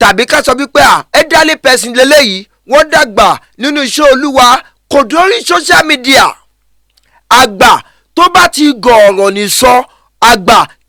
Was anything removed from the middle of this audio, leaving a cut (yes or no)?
no